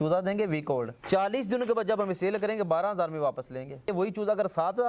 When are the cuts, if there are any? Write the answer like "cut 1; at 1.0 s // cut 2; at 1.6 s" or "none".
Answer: cut 1; at 0.9 s // cut 2; at 3.9 s